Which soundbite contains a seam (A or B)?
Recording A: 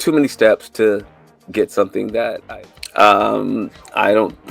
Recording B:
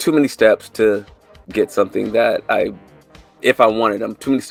A